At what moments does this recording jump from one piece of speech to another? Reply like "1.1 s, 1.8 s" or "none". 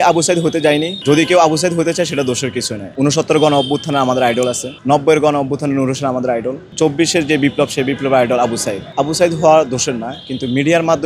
0.9 s, 2.8 s, 4.7 s, 6.6 s, 8.8 s